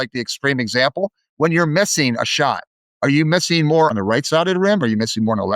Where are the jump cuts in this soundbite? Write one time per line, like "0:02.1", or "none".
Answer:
0:03.9